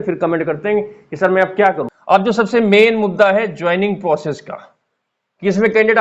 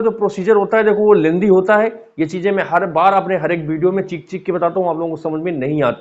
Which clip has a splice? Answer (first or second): first